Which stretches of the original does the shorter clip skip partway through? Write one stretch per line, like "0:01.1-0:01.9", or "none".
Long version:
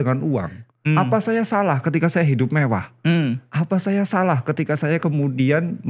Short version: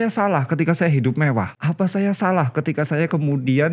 0:02.9-0:03.5